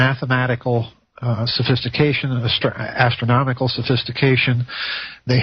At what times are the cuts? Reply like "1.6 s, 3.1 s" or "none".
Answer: 2.1 s